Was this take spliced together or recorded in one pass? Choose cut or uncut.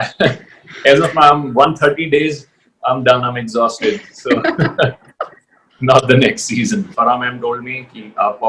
cut